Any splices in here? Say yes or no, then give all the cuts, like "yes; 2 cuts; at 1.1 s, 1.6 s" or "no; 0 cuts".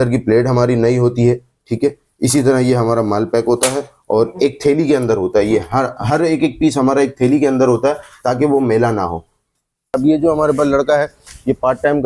yes; 1 cut; at 10.0 s